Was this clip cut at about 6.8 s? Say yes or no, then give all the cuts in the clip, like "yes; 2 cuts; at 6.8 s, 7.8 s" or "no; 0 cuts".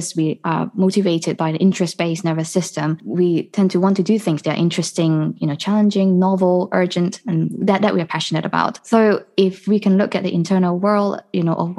no; 2 cuts; at 3.0 s, 8.8 s